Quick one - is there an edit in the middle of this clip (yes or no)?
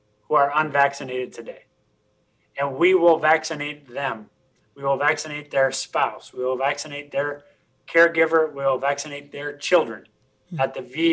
no